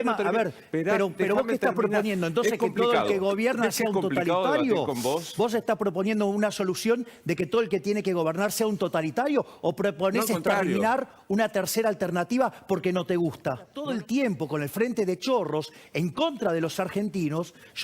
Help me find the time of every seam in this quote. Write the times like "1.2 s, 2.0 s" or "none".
13.8 s